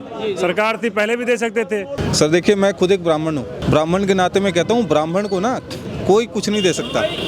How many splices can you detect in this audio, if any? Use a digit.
2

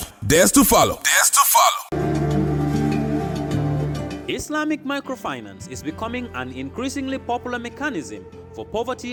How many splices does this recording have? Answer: 0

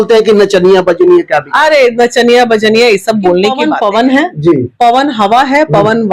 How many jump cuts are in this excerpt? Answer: 1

